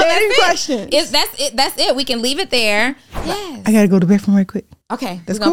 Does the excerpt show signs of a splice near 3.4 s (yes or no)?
yes